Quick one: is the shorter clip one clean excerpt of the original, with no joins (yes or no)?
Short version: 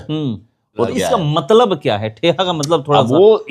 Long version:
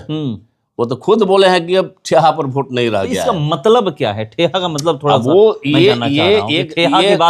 no